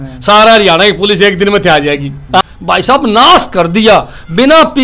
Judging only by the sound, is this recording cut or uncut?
cut